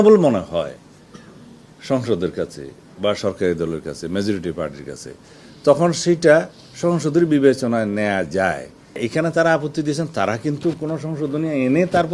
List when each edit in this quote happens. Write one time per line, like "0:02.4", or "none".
0:09.0